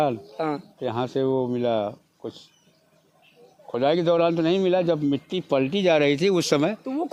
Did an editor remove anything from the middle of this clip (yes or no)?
no